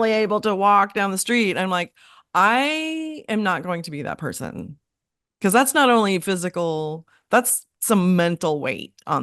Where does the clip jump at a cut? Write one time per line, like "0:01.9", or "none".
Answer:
none